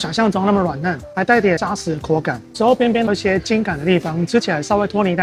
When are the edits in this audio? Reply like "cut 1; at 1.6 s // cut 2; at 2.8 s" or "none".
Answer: none